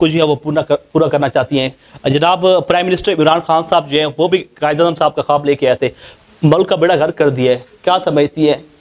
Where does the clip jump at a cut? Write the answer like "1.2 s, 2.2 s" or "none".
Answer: none